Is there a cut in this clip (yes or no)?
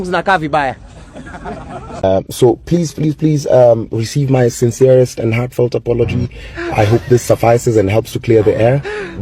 yes